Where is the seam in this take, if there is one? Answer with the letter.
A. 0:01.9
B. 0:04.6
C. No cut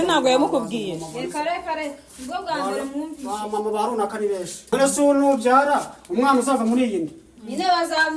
B